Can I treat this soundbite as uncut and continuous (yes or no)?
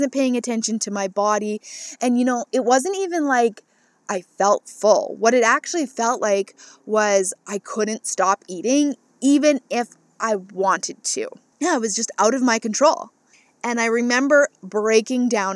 yes